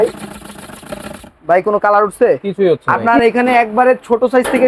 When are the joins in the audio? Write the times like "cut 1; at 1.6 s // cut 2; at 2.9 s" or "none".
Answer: cut 1; at 3.0 s